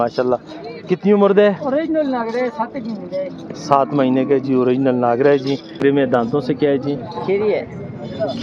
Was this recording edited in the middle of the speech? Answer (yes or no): yes